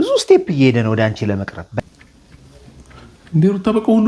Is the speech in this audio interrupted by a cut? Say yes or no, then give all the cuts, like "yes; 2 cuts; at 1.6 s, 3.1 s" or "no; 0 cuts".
yes; 1 cut; at 1.8 s